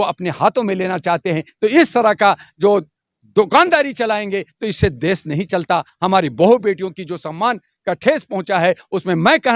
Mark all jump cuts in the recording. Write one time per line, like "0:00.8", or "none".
none